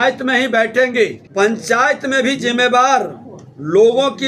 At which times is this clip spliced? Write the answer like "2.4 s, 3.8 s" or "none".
1.3 s